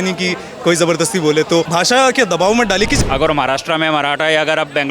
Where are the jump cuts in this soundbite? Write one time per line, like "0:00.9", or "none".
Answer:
0:01.7
0:03.0